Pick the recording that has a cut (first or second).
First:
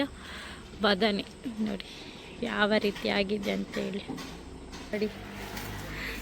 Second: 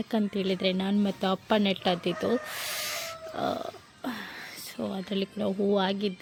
first